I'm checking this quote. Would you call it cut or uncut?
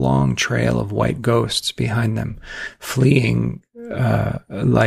uncut